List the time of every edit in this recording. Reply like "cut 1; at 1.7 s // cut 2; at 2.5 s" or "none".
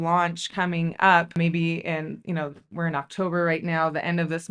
none

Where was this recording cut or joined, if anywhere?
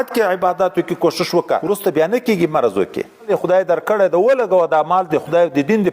cut 1; at 1.6 s // cut 2; at 3.3 s

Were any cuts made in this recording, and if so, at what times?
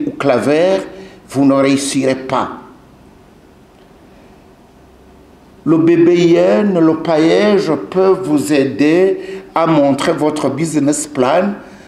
none

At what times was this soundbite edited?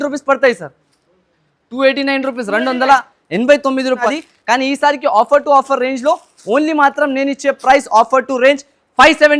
cut 1; at 4.0 s

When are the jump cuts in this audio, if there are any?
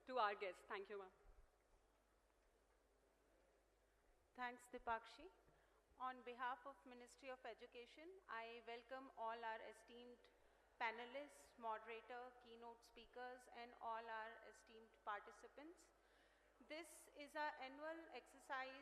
cut 1; at 3.3 s

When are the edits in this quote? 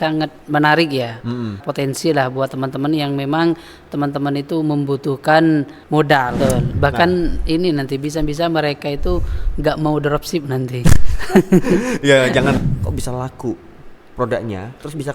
cut 1; at 1.6 s // cut 2; at 6.3 s // cut 3; at 12.6 s

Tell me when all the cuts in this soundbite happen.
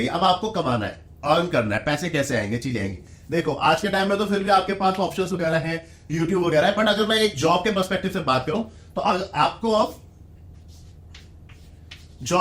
none

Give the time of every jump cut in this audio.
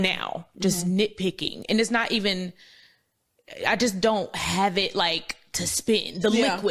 none

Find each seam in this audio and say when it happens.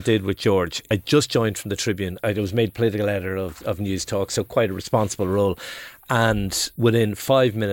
cut 1; at 0.9 s // cut 2; at 2.2 s // cut 3; at 6.6 s

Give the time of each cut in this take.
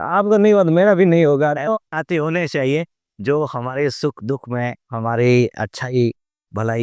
none

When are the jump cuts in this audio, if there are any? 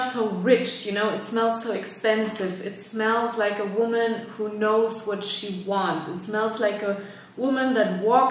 none

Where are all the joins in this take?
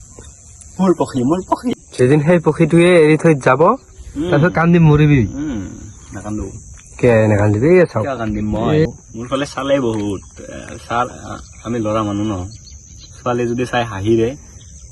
cut 1; at 1.7 s // cut 2; at 8.9 s

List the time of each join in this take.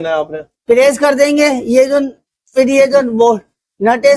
none

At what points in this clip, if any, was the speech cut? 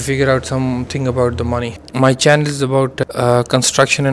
cut 1; at 1.7 s // cut 2; at 3.0 s

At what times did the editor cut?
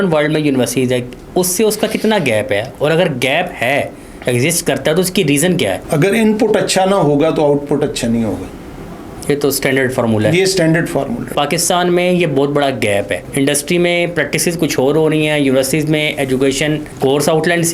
cut 1; at 5.8 s // cut 2; at 11.3 s // cut 3; at 13.2 s // cut 4; at 16.9 s

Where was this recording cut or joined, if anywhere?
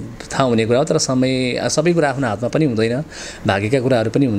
none

